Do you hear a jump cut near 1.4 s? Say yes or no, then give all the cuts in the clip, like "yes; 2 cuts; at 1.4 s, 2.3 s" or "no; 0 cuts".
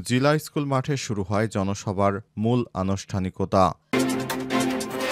no; 1 cut; at 3.9 s